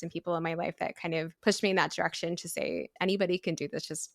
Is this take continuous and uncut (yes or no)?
no